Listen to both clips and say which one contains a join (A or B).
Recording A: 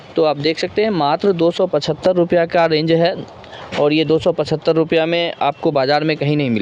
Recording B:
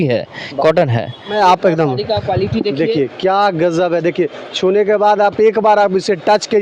B